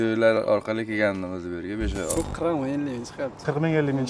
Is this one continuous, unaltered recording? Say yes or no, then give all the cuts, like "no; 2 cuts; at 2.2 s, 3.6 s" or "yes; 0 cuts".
no; 1 cut; at 2.1 s